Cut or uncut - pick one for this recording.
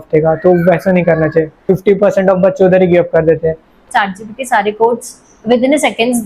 cut